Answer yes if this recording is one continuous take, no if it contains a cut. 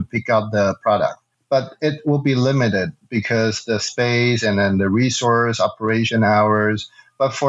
no